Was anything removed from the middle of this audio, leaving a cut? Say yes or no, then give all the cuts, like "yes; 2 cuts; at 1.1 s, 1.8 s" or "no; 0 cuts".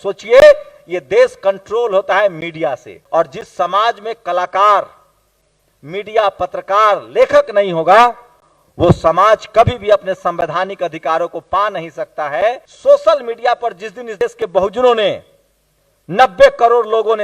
yes; 2 cuts; at 2.9 s, 12.7 s